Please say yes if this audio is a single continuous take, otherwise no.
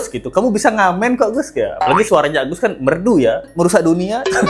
no